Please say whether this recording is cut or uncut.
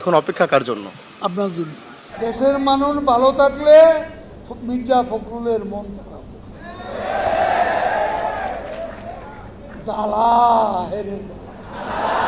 uncut